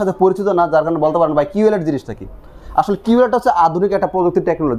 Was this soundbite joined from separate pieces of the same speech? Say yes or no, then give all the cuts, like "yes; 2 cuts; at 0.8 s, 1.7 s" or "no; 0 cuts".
no; 0 cuts